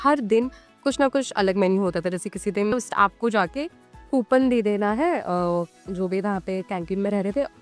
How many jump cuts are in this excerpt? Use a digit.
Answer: 1